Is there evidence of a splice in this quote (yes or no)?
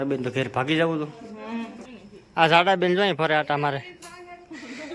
yes